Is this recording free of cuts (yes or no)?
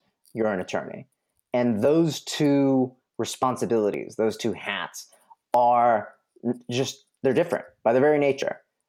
yes